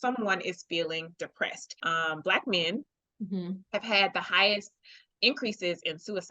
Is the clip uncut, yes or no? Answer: no